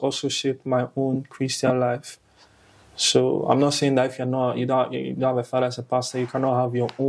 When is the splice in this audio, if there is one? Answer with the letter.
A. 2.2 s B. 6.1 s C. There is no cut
C